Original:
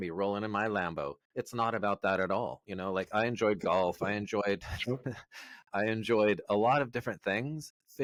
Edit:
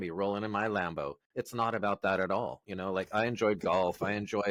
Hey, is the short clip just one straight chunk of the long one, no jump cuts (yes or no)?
yes